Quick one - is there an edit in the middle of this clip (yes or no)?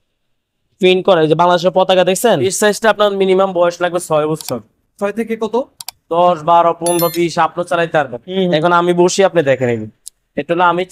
yes